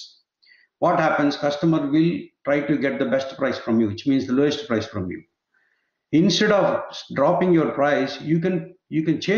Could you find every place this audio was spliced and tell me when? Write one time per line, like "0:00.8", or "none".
none

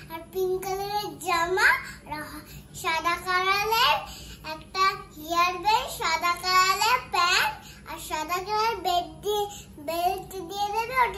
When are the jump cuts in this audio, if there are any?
none

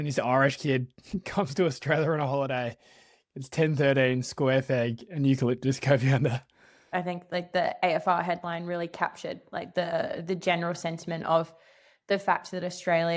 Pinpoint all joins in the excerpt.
0:06.9

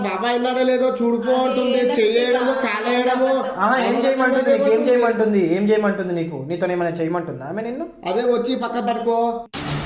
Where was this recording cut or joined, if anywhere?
none

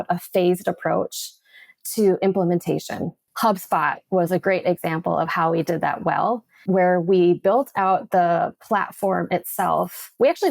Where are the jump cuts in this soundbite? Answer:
0:03.2
0:06.6

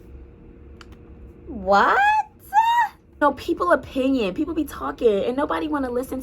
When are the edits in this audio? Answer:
0:03.2

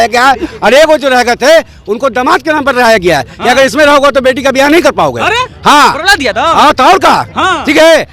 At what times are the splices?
none

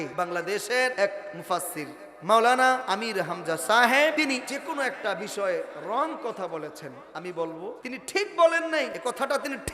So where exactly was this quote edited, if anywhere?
0:00.9
0:02.8
0:04.3
0:07.8
0:08.9

